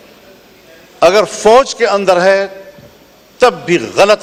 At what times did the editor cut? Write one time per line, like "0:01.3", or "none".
none